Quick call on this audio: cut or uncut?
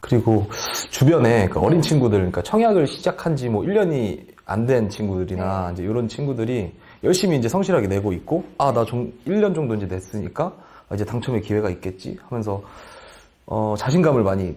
uncut